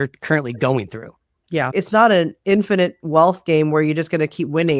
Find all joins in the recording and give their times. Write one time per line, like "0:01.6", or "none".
0:01.7